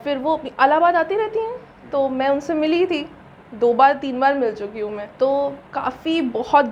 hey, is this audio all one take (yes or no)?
yes